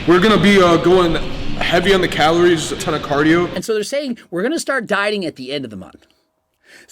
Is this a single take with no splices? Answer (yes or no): no